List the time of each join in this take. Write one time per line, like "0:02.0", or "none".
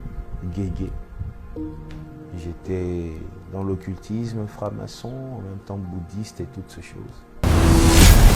0:07.3